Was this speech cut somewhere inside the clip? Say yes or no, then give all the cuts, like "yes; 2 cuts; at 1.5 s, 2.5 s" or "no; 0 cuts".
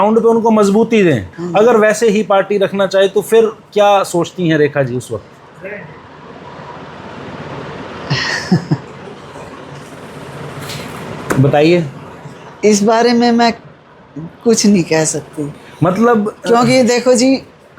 yes; 1 cut; at 1.3 s